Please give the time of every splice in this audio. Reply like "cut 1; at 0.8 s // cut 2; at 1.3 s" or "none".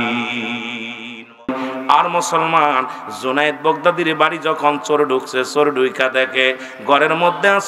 cut 1; at 1.4 s